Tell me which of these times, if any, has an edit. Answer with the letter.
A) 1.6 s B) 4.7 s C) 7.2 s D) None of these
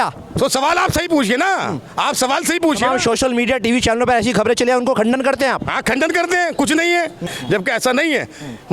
C